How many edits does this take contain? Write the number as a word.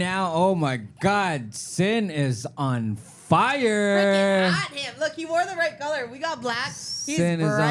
zero